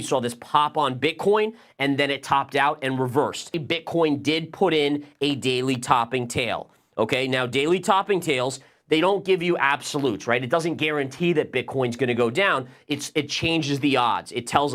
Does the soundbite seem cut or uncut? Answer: cut